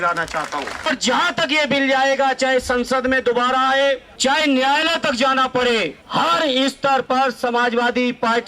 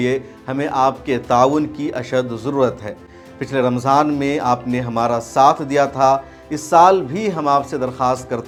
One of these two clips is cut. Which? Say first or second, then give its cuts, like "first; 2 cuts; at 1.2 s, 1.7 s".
first; 3 cuts; at 0.9 s, 4.1 s, 6.0 s